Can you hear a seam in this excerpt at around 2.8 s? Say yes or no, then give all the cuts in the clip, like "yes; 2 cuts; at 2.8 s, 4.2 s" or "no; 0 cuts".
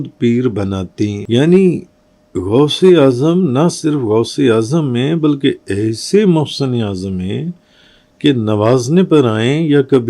no; 1 cut; at 1.2 s